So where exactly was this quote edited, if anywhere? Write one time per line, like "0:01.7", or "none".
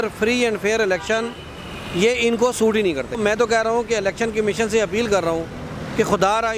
0:03.1